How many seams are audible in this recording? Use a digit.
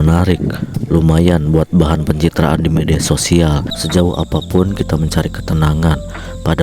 1